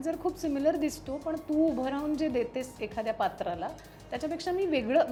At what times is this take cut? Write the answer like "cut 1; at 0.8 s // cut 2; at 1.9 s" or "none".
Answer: none